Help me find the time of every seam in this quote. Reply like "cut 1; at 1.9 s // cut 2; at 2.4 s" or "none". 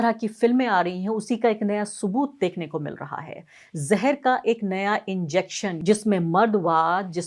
cut 1; at 5.7 s

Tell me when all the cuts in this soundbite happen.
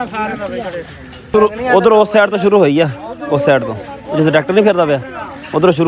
cut 1; at 1.3 s

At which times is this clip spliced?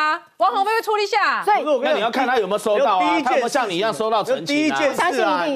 none

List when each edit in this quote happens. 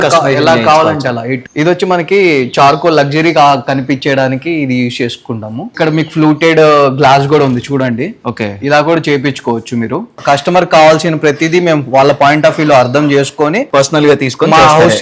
cut 1; at 1.4 s // cut 2; at 5.7 s // cut 3; at 10.1 s // cut 4; at 13.6 s

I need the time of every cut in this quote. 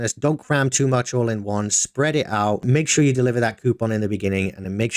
none

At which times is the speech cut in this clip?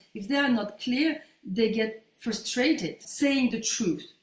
cut 1; at 3.0 s

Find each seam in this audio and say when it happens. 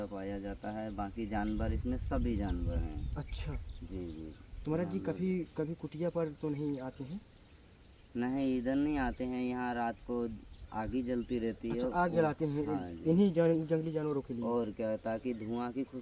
none

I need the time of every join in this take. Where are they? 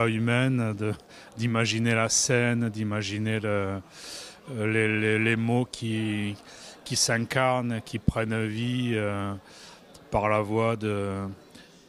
none

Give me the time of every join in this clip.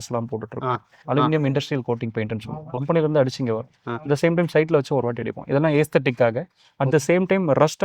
cut 1; at 0.9 s // cut 2; at 2.7 s

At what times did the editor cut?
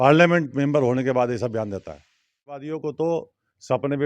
cut 1; at 2.6 s

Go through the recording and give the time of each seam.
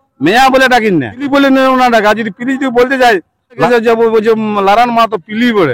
cut 1; at 1.3 s // cut 2; at 3.6 s

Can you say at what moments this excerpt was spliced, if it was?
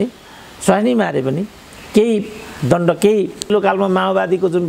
cut 1; at 3.5 s

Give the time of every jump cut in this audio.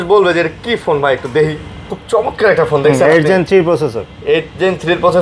cut 1; at 1.9 s

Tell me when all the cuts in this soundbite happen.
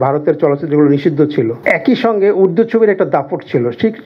cut 1; at 1.6 s

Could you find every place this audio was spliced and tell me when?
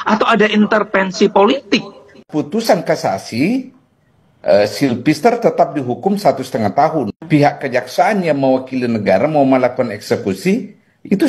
cut 1; at 2.2 s // cut 2; at 7.1 s

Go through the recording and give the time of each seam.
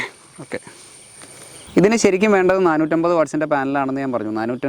cut 1; at 1.6 s

